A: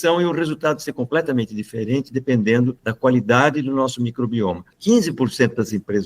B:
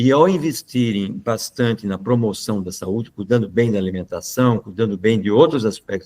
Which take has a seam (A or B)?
A